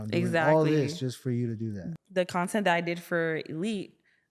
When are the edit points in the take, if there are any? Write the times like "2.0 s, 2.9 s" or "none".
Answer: 1.8 s